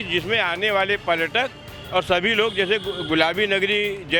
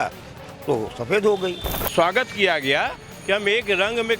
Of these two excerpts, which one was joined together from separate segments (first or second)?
second